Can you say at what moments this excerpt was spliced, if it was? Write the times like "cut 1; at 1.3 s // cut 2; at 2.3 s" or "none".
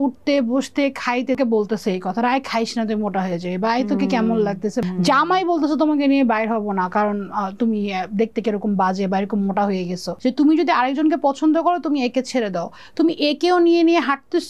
cut 1; at 1.4 s // cut 2; at 4.8 s // cut 3; at 10.0 s